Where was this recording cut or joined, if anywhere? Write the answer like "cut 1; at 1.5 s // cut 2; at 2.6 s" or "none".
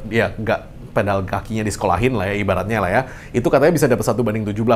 none